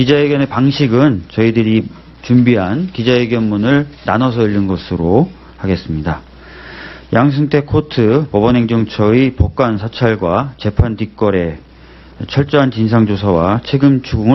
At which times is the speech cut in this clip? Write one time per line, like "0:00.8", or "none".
0:05.9